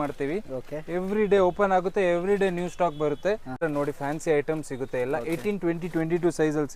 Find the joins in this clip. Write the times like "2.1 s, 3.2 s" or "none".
3.6 s